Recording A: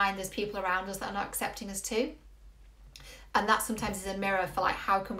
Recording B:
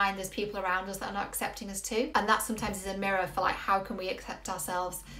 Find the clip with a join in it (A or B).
B